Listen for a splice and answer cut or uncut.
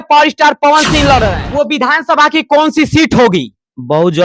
cut